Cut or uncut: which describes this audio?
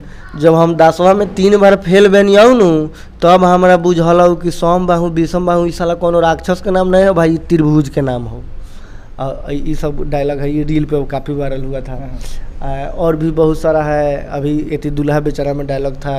uncut